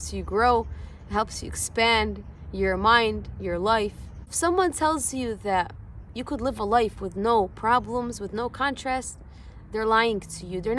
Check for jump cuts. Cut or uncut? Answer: cut